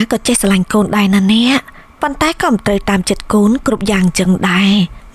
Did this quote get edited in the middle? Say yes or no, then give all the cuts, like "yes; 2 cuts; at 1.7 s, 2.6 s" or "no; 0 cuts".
no; 0 cuts